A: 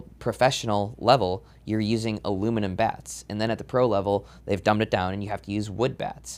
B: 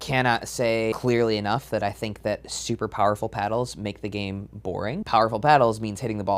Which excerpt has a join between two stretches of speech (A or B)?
B